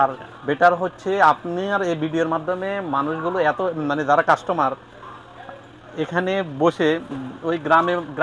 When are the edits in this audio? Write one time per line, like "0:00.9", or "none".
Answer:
none